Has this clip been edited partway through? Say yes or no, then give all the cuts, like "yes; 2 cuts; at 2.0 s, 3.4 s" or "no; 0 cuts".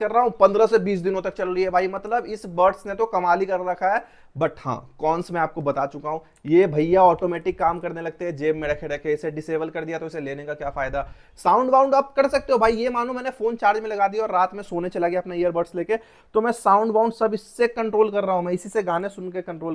no; 0 cuts